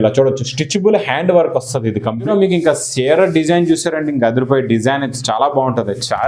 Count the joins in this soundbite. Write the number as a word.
one